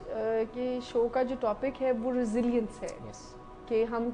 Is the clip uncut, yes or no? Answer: yes